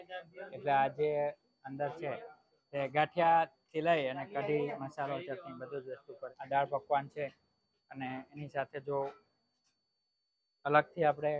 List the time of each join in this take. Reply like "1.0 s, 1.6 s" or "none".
6.2 s